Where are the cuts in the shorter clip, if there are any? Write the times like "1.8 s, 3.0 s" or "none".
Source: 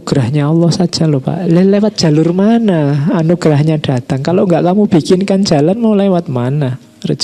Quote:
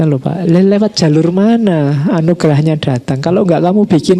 none